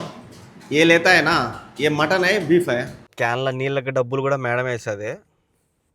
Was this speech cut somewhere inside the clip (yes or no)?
yes